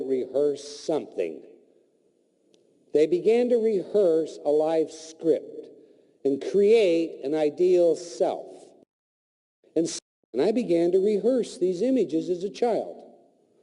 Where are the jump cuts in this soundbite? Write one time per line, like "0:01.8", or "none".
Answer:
0:04.1